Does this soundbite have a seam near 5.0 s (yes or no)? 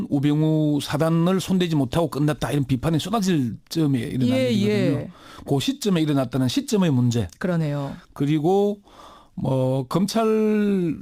yes